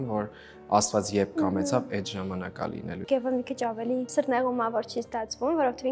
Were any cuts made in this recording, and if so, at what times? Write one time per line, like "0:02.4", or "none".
0:03.0
0:04.1